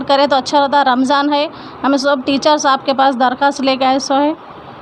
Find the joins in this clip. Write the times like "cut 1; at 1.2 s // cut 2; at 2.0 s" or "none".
none